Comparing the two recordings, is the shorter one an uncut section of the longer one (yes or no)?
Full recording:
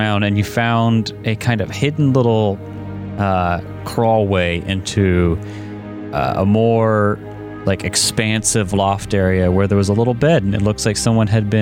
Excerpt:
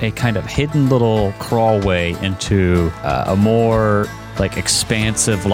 no